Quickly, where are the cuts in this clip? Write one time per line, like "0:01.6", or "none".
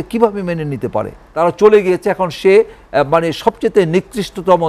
0:01.2